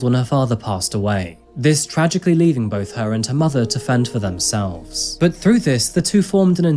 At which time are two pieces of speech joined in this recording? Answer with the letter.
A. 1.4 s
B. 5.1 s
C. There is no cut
C